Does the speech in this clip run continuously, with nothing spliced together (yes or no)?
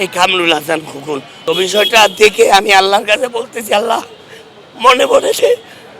no